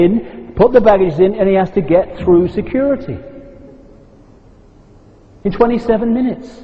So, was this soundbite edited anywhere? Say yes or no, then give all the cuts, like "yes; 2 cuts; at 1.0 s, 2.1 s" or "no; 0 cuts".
no; 0 cuts